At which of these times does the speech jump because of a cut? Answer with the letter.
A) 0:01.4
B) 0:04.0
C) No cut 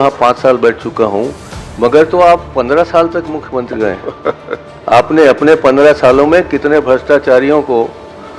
C